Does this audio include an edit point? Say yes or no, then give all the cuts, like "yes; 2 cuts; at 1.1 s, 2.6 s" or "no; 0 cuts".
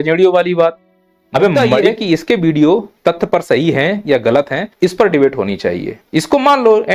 yes; 4 cuts; at 1.9 s, 2.9 s, 4.6 s, 5.9 s